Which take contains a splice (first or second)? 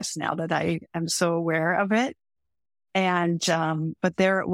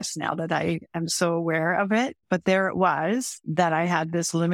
second